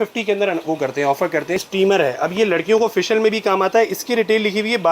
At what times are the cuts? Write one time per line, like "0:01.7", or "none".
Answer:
0:01.6